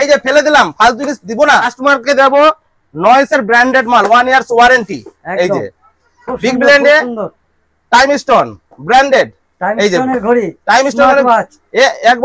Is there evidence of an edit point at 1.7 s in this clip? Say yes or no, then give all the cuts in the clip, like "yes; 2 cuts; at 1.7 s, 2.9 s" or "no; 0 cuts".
no; 0 cuts